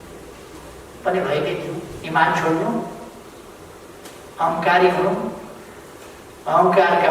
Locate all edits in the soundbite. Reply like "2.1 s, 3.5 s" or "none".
1.9 s